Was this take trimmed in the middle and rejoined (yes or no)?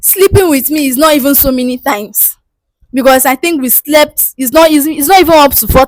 no